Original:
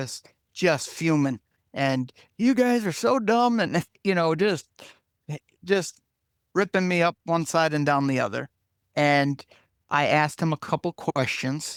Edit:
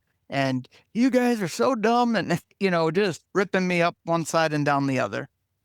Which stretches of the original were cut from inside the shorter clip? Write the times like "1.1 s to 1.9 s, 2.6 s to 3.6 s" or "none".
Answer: 4.7 s to 6.4 s